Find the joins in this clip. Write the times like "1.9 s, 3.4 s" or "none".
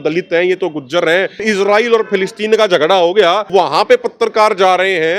1.4 s, 3.5 s